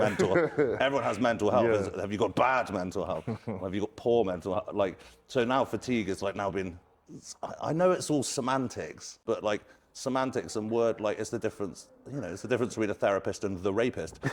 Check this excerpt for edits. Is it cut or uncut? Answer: cut